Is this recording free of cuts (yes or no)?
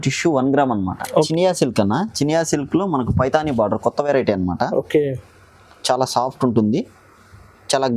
no